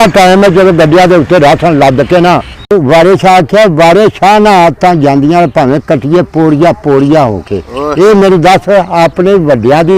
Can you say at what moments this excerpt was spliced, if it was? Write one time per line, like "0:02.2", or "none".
0:02.7